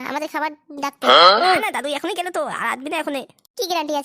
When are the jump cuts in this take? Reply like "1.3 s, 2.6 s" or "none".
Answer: 1.0 s, 1.6 s